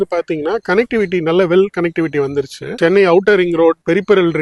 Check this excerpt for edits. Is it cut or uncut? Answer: cut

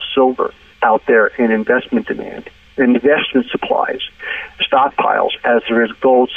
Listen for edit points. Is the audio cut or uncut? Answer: uncut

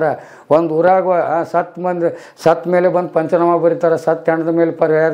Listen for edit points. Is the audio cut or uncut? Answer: uncut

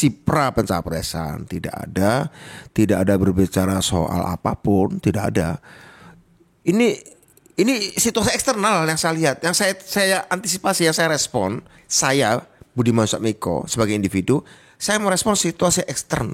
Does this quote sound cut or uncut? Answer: uncut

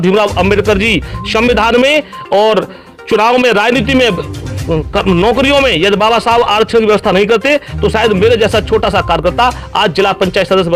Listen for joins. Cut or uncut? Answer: uncut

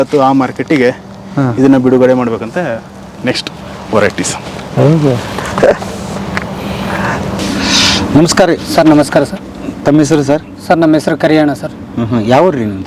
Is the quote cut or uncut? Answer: uncut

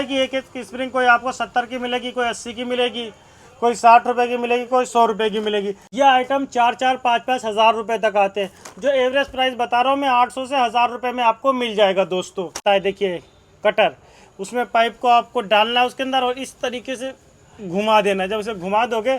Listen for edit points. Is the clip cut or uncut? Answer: cut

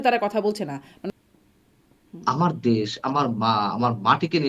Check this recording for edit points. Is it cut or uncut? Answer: cut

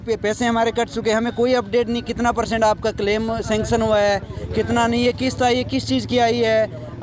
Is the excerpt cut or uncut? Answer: uncut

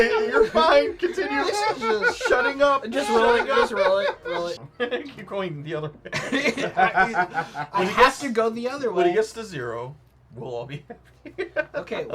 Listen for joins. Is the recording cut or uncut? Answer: cut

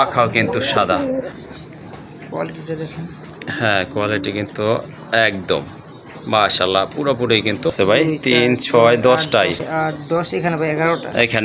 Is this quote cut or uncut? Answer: cut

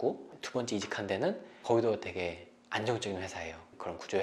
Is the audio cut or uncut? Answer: uncut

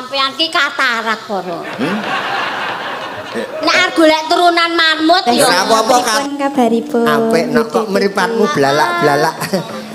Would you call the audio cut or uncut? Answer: cut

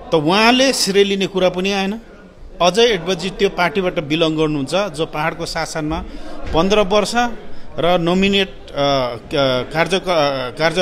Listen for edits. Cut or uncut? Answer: uncut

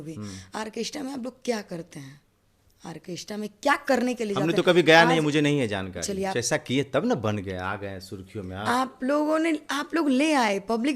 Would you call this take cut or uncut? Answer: cut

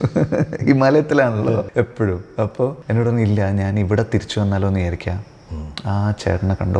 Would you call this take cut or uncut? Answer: cut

